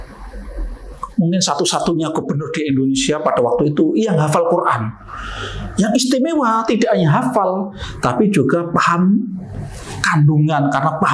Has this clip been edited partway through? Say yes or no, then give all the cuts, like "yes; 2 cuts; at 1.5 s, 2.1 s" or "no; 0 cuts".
no; 0 cuts